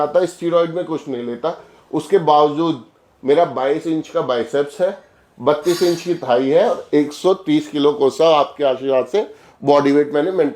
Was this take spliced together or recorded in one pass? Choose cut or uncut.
uncut